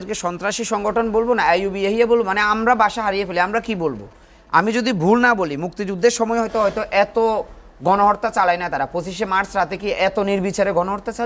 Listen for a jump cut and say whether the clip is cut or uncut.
uncut